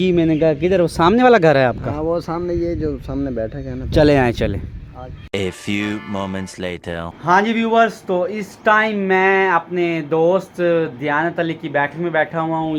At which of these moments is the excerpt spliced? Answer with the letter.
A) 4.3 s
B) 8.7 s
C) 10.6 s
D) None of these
D